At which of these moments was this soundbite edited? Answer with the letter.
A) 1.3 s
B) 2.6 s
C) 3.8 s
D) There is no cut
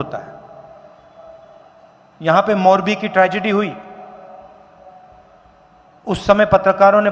D